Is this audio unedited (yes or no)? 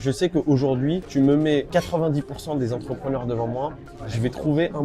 no